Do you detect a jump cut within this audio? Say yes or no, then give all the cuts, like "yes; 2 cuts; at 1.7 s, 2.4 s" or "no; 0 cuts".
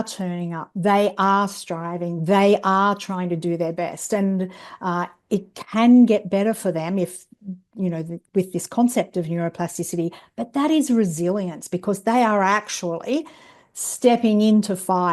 no; 0 cuts